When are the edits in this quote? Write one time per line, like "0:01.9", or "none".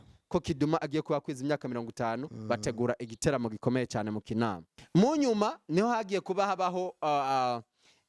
0:04.7